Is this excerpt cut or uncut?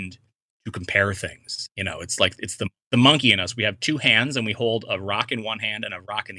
cut